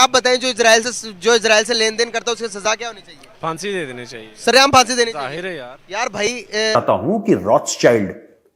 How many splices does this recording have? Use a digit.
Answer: 1